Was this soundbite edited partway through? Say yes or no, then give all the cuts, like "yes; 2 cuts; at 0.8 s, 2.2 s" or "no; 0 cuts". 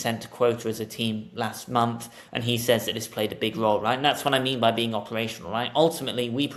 no; 0 cuts